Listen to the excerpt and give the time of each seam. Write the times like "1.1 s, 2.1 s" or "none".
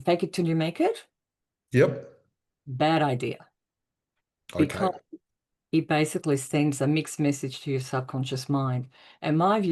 none

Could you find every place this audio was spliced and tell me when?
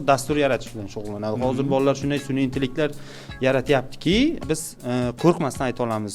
4.4 s

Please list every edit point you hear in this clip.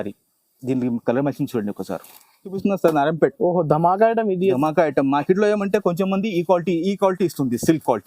2.6 s

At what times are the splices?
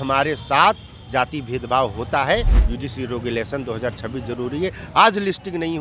2.6 s

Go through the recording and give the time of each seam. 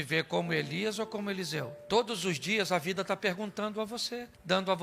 1.7 s

